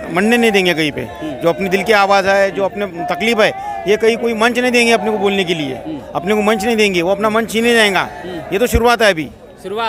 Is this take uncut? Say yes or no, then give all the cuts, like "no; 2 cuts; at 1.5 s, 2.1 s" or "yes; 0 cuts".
yes; 0 cuts